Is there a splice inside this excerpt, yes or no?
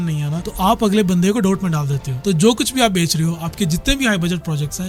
no